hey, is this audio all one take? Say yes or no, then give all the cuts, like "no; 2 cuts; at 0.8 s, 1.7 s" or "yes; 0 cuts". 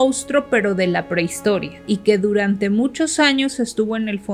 no; 1 cut; at 1.8 s